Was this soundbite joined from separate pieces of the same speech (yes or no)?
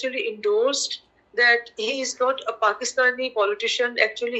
no